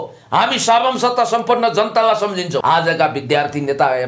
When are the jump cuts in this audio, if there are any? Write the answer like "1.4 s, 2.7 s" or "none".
2.6 s